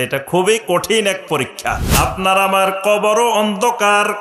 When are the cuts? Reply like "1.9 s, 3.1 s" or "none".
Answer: 1.8 s

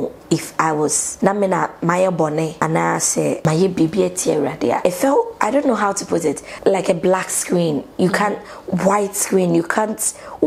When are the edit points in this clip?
1.0 s, 2.5 s, 3.4 s, 4.8 s, 6.5 s

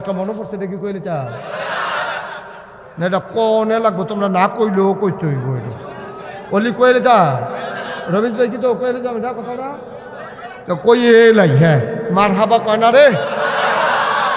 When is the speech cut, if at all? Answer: 12.0 s

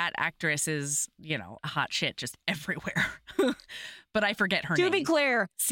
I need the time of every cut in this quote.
1.5 s

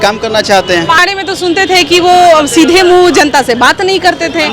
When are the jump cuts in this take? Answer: 1.0 s

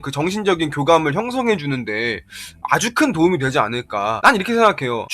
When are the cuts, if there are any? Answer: 4.2 s

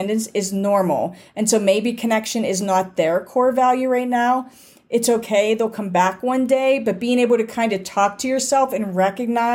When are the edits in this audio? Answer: none

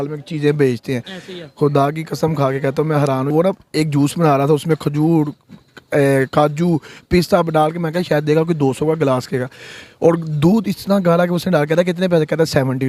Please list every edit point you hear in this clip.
3.3 s

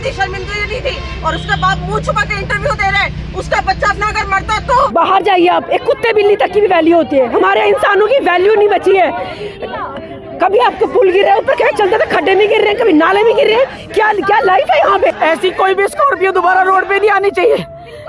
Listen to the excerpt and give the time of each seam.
4.9 s, 15.1 s

